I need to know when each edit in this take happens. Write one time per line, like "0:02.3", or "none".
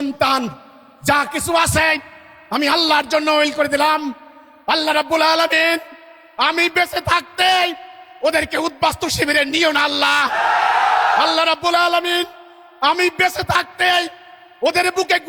none

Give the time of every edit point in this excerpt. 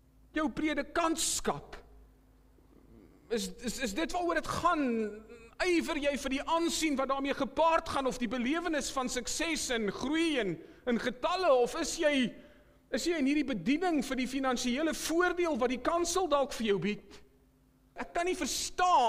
0:18.0

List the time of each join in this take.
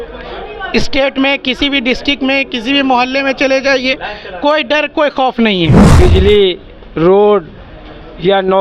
0:05.9

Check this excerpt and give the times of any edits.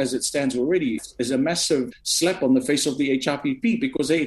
0:01.0
0:01.9

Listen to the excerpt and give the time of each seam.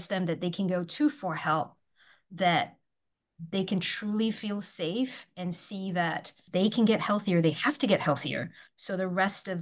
0:06.4

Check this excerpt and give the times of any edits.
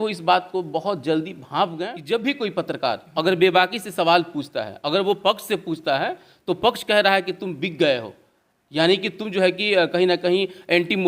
0:01.9

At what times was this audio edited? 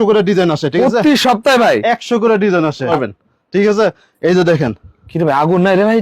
0:02.9

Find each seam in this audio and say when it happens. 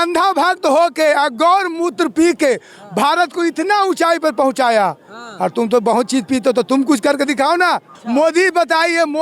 0:07.9

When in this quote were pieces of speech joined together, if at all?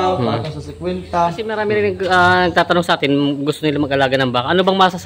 0:01.5

